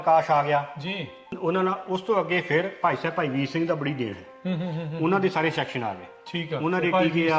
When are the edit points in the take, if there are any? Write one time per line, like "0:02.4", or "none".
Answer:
0:01.4